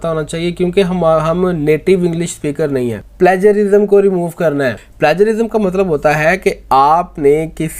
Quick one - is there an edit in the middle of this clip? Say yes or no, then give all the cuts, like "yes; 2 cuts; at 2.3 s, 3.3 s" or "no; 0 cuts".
yes; 2 cuts; at 3.0 s, 4.8 s